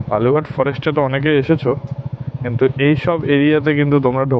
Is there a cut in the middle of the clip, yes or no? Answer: no